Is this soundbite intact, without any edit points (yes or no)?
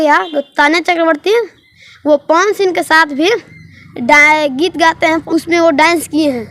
no